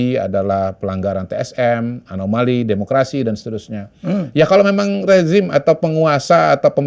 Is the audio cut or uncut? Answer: uncut